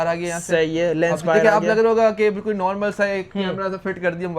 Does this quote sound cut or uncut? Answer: uncut